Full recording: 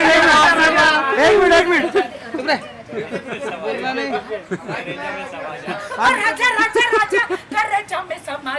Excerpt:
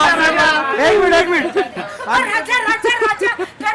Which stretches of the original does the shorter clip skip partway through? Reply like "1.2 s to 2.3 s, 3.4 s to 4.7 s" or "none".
2.2 s to 5.7 s